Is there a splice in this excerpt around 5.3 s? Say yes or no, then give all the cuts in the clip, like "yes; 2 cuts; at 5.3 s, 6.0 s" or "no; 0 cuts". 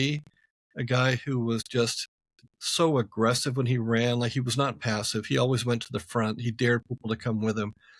no; 0 cuts